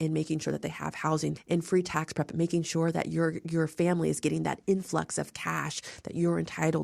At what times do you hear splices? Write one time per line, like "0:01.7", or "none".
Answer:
0:01.4